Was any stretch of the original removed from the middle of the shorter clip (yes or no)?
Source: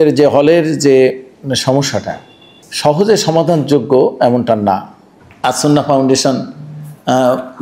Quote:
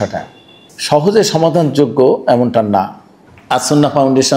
no